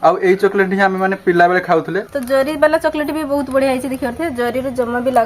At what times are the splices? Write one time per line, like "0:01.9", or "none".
0:02.0